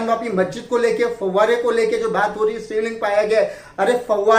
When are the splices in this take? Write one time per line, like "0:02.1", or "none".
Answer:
none